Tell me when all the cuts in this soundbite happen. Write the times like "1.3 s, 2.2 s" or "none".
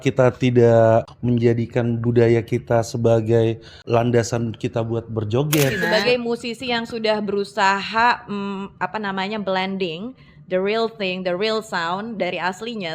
1.0 s, 3.7 s, 5.8 s